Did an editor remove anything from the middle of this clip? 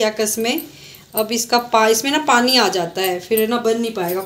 no; 0 cuts

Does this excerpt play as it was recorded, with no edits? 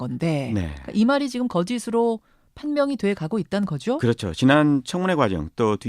no; 1 cut; at 3.8 s

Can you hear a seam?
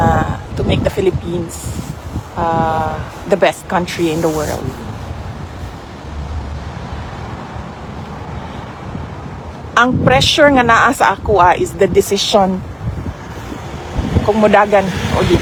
no; 0 cuts

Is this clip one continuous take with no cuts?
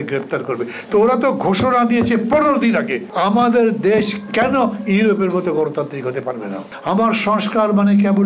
no; 2 cuts; at 3.0 s, 6.7 s

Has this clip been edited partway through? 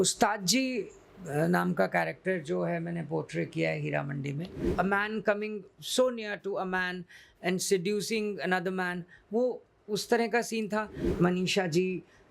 yes; 2 cuts; at 4.6 s, 11.0 s

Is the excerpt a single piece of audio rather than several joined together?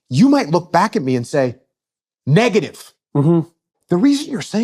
no; 1 cut; at 3.7 s

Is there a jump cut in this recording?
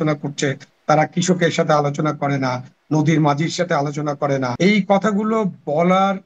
yes; 1 cut; at 4.5 s

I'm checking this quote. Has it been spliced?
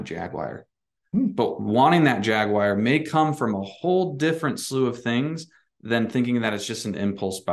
no; 0 cuts

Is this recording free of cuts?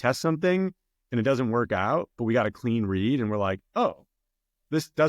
yes; 0 cuts

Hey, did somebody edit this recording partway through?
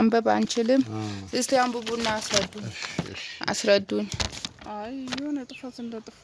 yes; 1 cut; at 4.2 s

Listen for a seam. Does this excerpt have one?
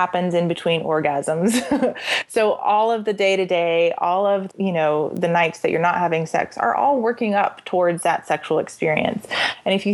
yes; 1 cut; at 4.4 s

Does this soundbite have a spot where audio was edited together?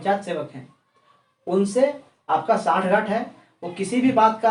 no; 0 cuts

